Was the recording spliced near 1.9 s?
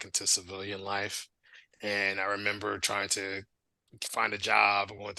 no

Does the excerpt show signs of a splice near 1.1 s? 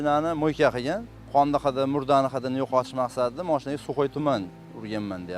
yes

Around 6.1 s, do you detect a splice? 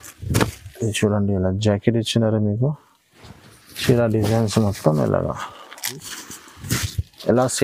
yes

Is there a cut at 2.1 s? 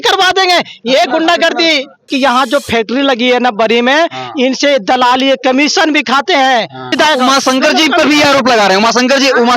yes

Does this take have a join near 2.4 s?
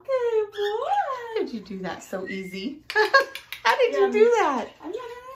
no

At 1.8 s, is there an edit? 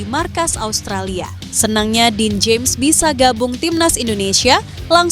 yes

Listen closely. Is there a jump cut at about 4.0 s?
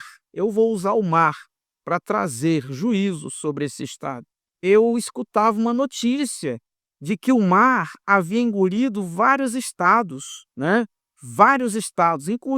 yes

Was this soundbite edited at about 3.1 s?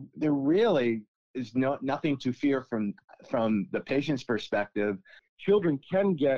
no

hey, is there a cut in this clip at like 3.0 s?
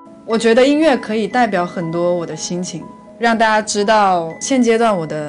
no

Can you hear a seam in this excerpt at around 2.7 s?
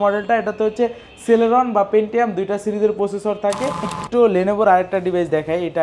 no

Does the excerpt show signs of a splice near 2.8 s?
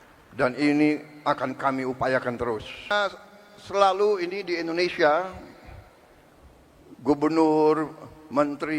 yes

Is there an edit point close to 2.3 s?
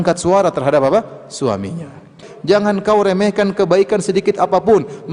yes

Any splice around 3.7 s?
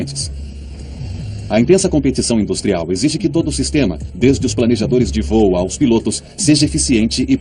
no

